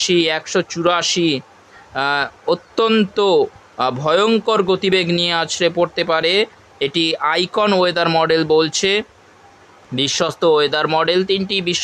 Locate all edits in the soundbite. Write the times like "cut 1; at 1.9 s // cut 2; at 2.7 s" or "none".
none